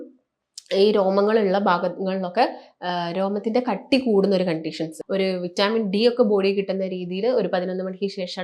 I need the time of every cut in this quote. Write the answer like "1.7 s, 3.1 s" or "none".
4.9 s